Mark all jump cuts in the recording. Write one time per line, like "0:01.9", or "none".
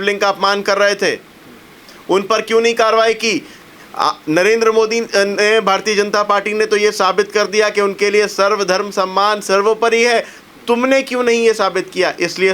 none

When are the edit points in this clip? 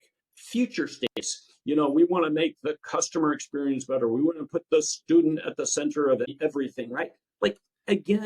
0:06.3

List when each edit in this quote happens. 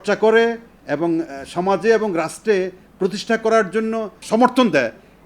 0:04.2

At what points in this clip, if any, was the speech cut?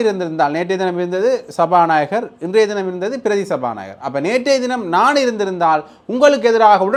none

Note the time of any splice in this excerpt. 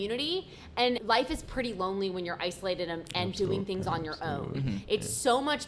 0:01.0

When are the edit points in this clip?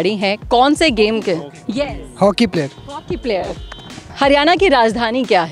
0:04.1

